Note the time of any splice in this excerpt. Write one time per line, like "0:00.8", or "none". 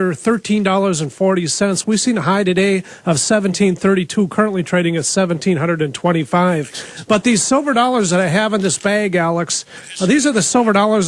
0:06.1